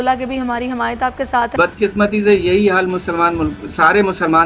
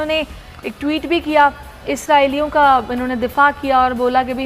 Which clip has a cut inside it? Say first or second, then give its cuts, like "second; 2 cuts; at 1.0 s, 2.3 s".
first; 1 cut; at 1.5 s